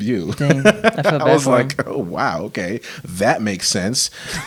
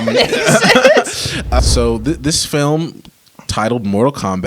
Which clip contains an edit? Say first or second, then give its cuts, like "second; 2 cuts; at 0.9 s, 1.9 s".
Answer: second; 1 cut; at 1.5 s